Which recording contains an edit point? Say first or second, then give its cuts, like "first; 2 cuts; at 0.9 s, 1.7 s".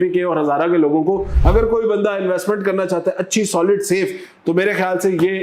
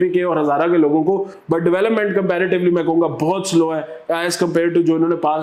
first; 1 cut; at 1.3 s